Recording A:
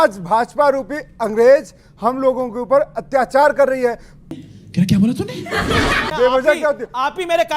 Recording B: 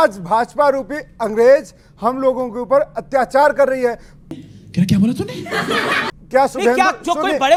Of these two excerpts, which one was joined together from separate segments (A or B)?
A